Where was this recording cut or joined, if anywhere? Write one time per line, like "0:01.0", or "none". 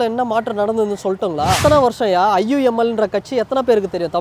0:01.6